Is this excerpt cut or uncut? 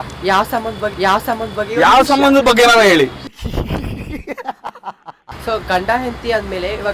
uncut